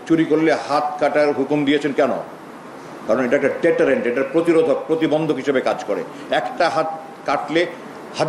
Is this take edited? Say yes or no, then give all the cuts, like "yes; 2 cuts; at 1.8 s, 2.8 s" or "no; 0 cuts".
no; 0 cuts